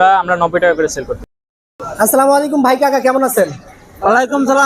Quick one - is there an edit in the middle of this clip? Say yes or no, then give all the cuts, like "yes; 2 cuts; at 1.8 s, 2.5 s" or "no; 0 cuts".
yes; 1 cut; at 1.3 s